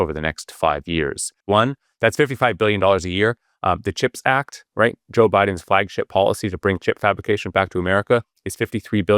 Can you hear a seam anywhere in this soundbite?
yes; 1 cut; at 1.3 s

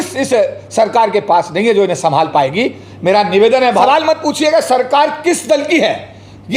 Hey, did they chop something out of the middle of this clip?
yes; 1 cut; at 3.8 s

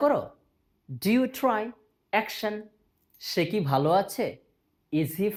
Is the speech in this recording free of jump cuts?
yes; 0 cuts

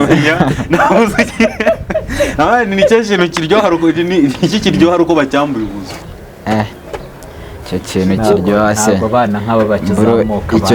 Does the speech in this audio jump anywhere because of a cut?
no; 0 cuts

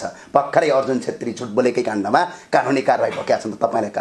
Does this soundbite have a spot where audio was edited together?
no; 0 cuts

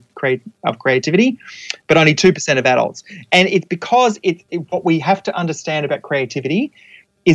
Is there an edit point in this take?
no; 0 cuts

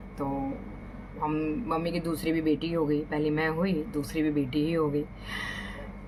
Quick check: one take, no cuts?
yes; 0 cuts

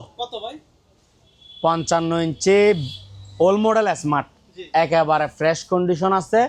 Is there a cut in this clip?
no; 0 cuts

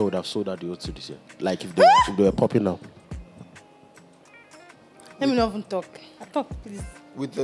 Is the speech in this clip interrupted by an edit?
no; 0 cuts

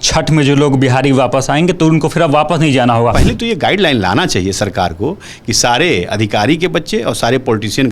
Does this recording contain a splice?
yes; 1 cut; at 3.2 s

